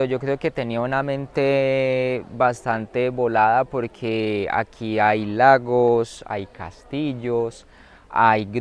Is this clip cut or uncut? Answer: uncut